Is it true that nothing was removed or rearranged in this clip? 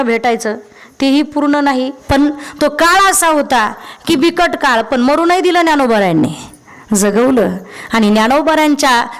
no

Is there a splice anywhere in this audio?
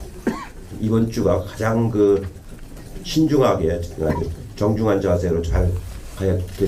yes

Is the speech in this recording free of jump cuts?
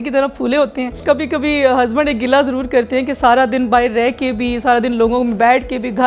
no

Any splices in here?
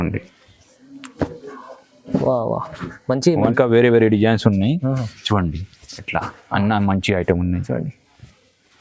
yes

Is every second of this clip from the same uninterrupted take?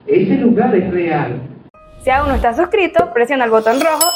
no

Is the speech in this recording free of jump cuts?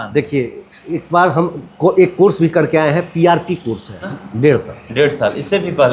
no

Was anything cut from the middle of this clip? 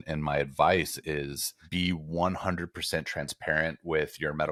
no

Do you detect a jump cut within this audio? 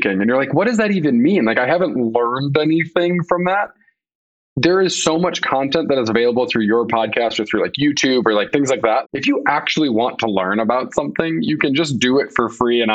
yes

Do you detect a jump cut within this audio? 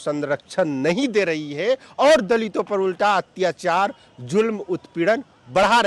no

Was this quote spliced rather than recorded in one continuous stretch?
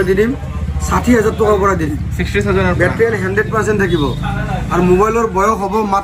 no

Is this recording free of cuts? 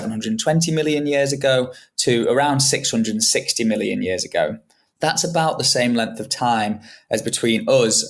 no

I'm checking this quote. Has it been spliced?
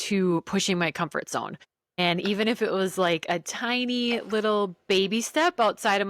no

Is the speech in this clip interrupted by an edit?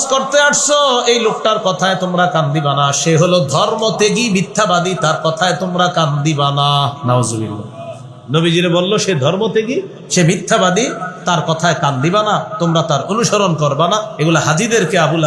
no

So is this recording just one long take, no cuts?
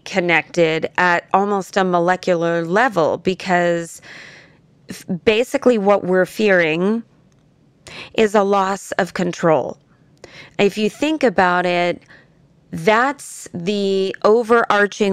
yes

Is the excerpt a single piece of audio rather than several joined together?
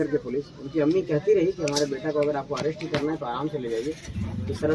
yes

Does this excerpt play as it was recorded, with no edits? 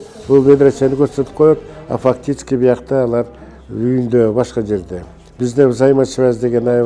no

